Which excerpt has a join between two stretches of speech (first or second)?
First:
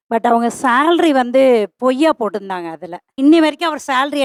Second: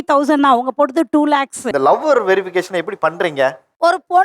second